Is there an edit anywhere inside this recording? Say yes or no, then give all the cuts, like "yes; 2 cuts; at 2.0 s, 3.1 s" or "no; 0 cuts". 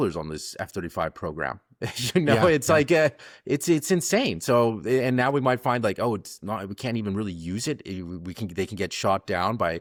no; 0 cuts